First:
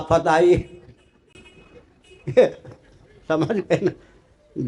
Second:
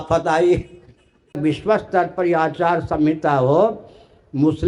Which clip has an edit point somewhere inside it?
second; 1 cut; at 1.4 s

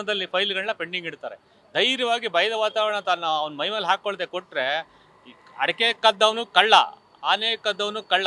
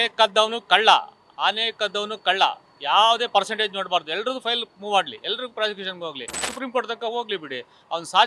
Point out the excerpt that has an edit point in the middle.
second; 1 cut; at 6.5 s

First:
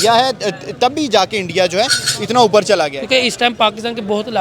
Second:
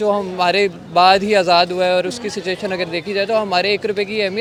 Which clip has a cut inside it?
first; 1 cut; at 3.0 s

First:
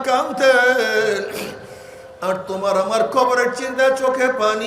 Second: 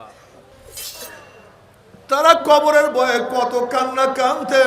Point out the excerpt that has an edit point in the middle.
second; 1 cut; at 1.0 s

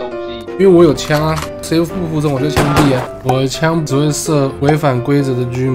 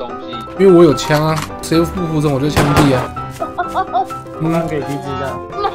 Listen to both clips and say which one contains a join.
first; 1 cut; at 3.2 s

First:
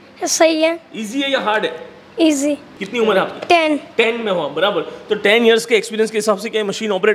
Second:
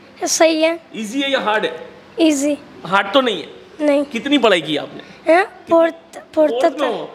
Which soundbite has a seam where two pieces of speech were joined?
first; 1 cut; at 2.7 s

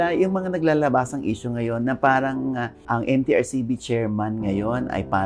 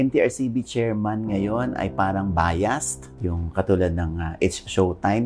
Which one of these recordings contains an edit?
second; 1 cut; at 3.1 s

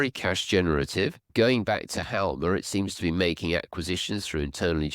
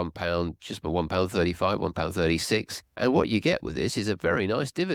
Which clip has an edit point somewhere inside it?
first; 1 cut; at 1.2 s

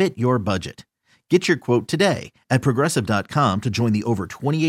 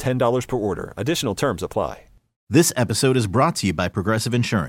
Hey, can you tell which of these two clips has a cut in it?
second; 1 cut; at 2.2 s

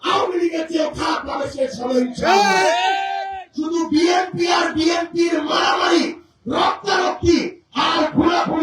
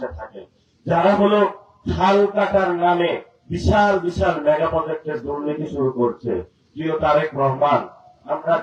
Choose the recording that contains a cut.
first; 1 cut; at 3.4 s

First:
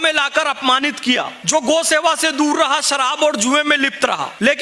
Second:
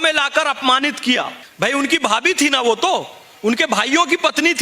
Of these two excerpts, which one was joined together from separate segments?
first; 1 cut; at 1.4 s

